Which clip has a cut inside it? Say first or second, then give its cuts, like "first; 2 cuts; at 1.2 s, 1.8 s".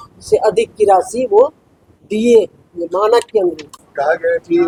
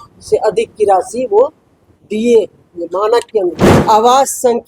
second; 1 cut; at 3.7 s